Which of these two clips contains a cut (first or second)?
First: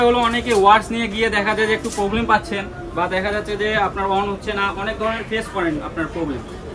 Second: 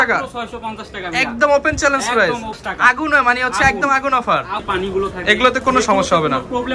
second